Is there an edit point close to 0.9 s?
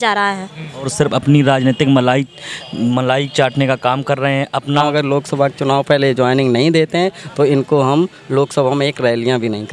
yes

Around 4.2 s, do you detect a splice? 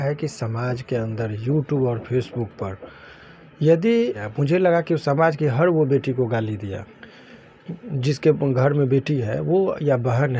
yes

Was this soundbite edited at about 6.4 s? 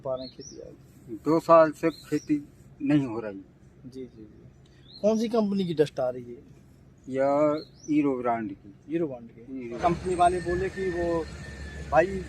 no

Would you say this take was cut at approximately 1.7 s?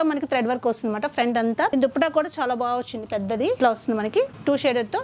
yes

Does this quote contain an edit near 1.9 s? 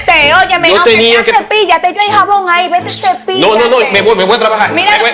no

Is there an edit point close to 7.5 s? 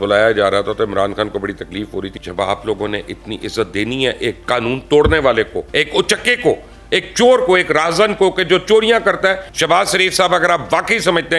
no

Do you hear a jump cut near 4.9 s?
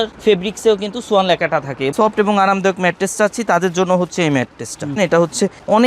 yes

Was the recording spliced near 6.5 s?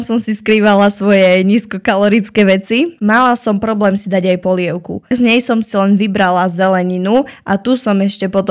no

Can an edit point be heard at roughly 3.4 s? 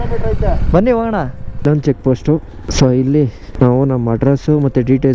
yes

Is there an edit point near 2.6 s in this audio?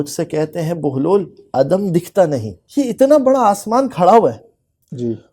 yes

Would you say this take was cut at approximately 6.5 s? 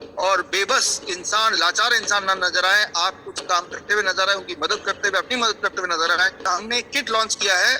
yes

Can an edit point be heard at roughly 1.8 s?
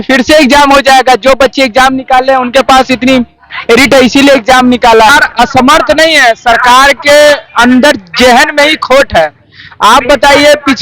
no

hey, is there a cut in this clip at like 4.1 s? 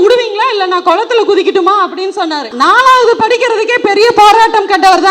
no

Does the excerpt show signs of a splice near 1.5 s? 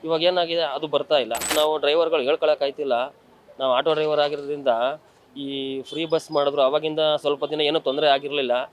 yes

